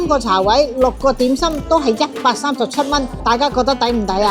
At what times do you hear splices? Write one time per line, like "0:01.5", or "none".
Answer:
0:03.1

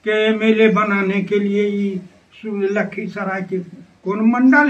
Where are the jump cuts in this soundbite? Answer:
none

